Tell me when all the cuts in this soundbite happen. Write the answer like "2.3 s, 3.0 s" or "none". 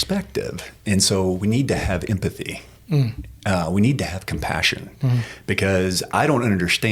none